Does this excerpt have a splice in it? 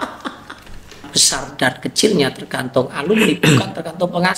yes; 1 cut; at 1.1 s

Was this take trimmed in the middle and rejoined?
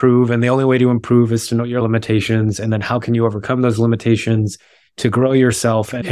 yes; 1 cut; at 1.8 s

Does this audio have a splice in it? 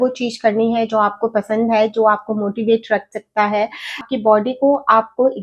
yes; 1 cut; at 4.1 s

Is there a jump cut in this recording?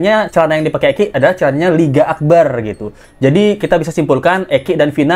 no; 0 cuts

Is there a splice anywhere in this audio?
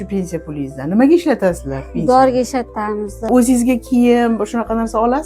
yes; 1 cut; at 3.3 s

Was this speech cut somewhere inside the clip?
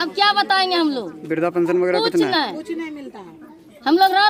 no; 0 cuts

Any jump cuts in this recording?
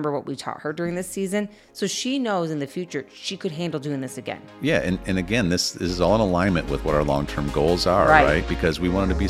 no; 0 cuts

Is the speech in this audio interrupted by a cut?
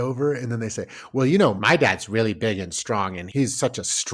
yes; 1 cut; at 3.2 s

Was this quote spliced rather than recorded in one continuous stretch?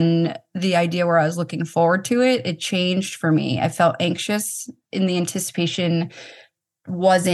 no; 0 cuts

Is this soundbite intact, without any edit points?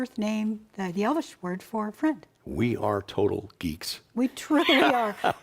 yes; 0 cuts

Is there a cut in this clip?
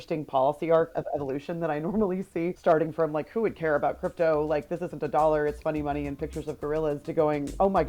yes; 1 cut; at 0.9 s

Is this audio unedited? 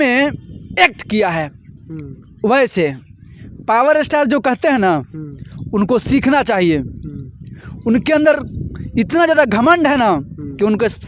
yes; 0 cuts

